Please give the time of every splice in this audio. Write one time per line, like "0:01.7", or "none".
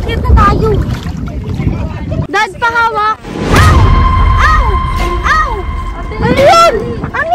0:02.3